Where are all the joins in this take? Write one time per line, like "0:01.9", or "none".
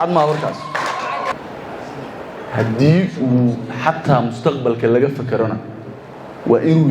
0:01.3